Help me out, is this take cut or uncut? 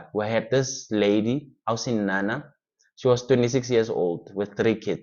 uncut